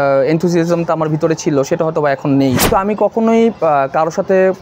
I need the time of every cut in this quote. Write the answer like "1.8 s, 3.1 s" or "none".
2.7 s